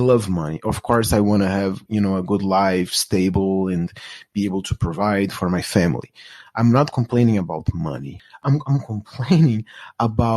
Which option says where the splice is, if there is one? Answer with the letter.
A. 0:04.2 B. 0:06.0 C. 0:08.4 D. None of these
C